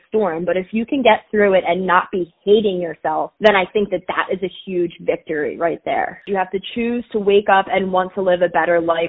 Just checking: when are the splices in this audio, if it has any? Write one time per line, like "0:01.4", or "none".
0:03.3
0:06.3